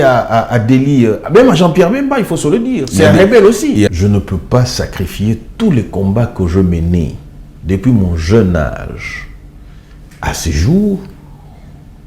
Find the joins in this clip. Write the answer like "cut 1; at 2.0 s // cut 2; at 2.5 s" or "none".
cut 1; at 3.9 s